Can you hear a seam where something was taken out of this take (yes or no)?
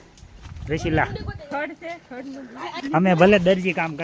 yes